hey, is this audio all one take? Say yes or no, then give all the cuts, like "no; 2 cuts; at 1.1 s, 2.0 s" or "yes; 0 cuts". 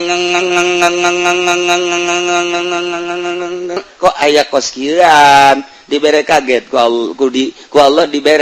no; 1 cut; at 3.8 s